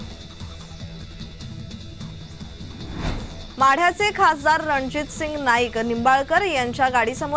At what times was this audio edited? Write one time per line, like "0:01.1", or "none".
0:01.0